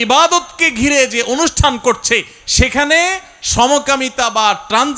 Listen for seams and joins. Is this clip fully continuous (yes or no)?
yes